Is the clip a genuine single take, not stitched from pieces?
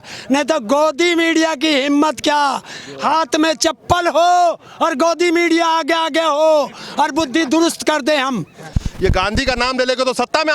no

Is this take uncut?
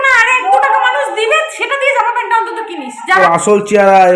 no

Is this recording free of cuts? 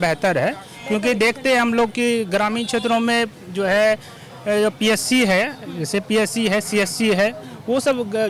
yes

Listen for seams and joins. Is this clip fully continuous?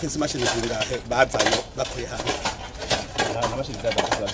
yes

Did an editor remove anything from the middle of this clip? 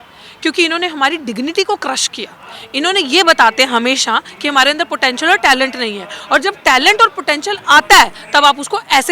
no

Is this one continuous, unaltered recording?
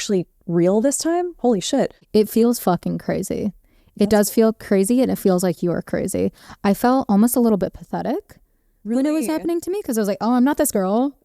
no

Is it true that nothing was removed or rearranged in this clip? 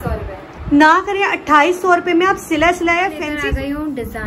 no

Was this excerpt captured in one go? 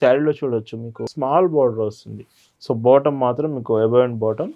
no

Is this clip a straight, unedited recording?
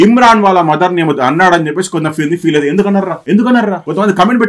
yes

